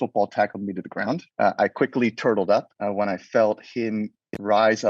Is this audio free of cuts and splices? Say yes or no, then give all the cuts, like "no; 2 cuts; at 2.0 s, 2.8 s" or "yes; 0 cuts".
no; 2 cuts; at 1.3 s, 2.7 s